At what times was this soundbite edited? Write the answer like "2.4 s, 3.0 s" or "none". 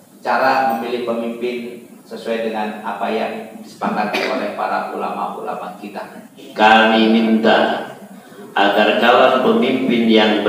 6.4 s